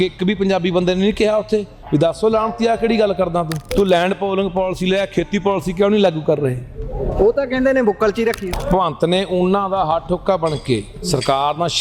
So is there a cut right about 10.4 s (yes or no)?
no